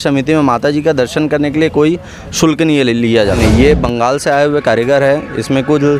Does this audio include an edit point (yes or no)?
yes